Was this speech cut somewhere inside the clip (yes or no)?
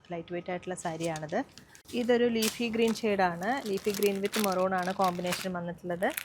no